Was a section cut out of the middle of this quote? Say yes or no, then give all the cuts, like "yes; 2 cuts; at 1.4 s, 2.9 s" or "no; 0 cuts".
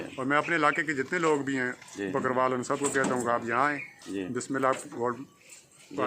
no; 0 cuts